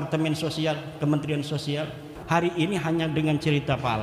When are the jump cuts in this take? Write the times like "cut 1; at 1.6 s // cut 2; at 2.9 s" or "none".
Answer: cut 1; at 2.1 s